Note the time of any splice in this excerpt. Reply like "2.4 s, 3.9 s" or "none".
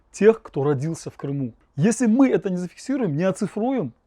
1.6 s

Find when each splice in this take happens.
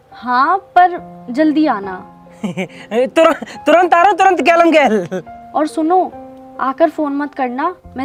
none

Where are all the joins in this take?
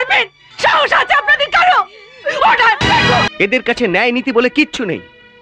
3.3 s

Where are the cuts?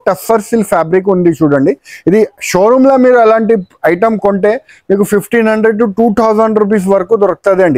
none

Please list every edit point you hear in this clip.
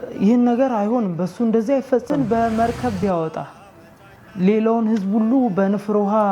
2.1 s

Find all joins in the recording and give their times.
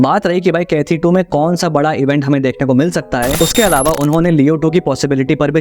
3.3 s

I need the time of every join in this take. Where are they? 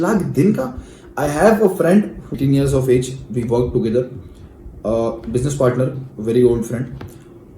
2.2 s

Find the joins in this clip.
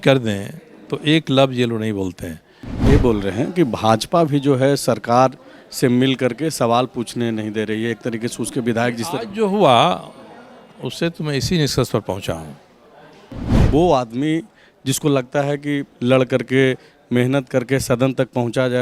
2.8 s, 13.5 s

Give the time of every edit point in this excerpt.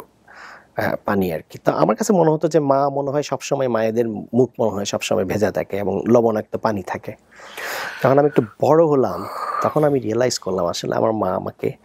none

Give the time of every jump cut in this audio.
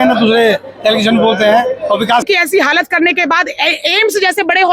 2.2 s

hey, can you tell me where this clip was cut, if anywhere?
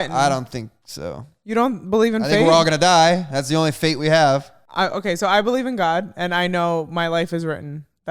4.6 s

